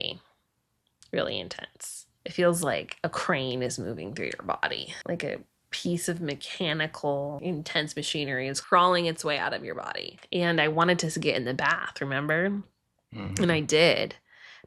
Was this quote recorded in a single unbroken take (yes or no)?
yes